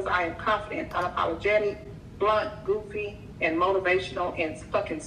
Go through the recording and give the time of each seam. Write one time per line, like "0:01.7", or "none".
none

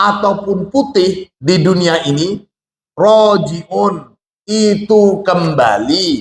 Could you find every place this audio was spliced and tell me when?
0:01.3

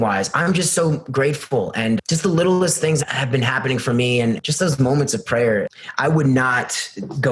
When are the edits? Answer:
0:02.0
0:03.0
0:04.4
0:05.7

